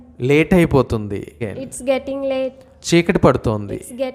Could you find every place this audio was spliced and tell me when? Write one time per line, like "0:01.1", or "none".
0:01.6
0:02.7

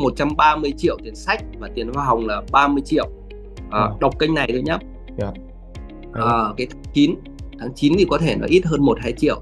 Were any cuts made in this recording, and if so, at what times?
none

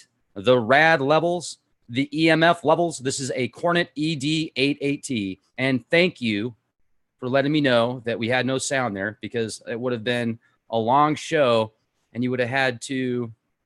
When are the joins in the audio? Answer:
0:11.3

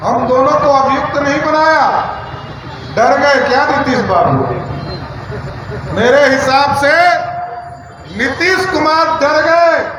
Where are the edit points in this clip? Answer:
none

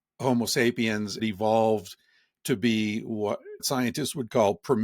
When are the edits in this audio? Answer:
0:01.2
0:03.6

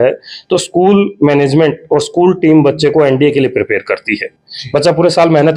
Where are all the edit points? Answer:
0:04.3

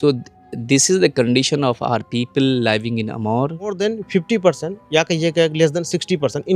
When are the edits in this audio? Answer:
0:03.8

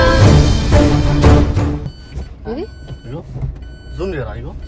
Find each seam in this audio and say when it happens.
0:01.9

